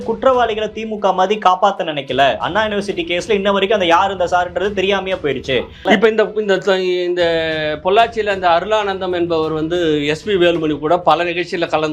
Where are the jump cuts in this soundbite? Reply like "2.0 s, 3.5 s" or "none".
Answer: 5.8 s

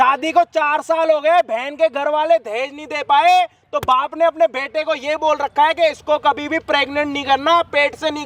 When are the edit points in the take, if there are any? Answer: none

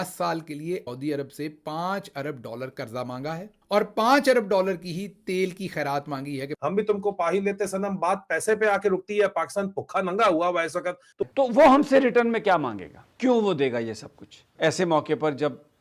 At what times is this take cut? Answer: 0.9 s, 6.5 s, 11.2 s

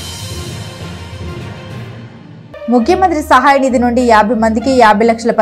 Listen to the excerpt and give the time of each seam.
2.7 s

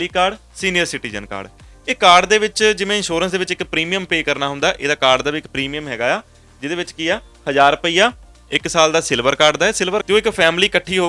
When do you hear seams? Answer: 10.0 s

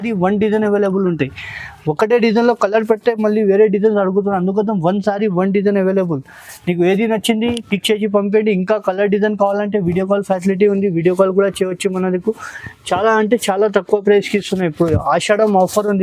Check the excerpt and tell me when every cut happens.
none

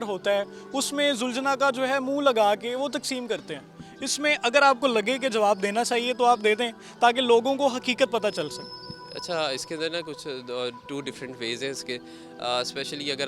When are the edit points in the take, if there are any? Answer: none

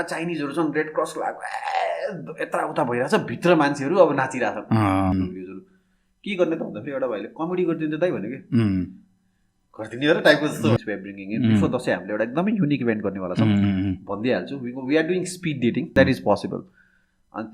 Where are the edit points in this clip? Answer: 5.1 s, 10.8 s, 15.9 s

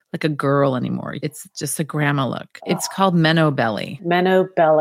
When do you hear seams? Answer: 1.1 s, 2.5 s, 4.0 s

